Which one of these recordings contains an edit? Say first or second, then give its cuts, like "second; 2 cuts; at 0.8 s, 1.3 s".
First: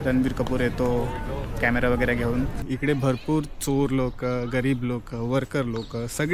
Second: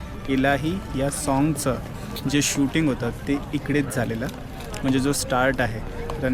first; 1 cut; at 2.6 s